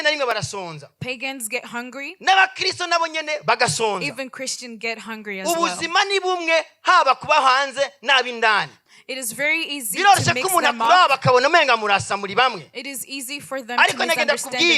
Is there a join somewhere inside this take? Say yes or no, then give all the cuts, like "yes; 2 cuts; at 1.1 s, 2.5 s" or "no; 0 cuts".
yes; 1 cut; at 8.8 s